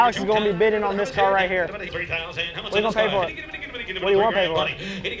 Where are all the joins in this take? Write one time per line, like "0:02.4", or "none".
none